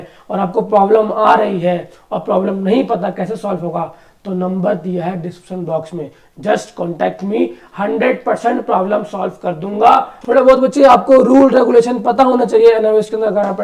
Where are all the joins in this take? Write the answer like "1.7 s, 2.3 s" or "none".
10.1 s